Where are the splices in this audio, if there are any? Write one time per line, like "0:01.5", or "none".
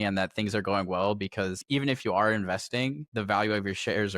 0:01.6
0:03.0